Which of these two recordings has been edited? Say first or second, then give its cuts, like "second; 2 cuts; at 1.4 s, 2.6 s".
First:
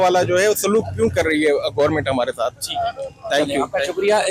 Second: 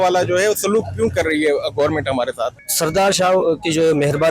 second; 1 cut; at 2.6 s